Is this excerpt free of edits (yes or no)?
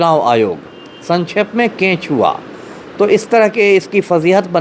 yes